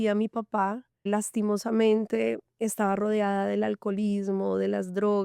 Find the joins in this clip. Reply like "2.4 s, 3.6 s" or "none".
1.1 s